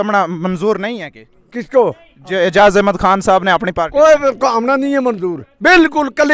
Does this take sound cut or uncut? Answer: uncut